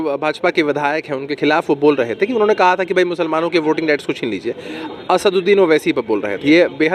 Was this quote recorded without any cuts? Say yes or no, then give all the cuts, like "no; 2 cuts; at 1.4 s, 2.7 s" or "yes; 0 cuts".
yes; 0 cuts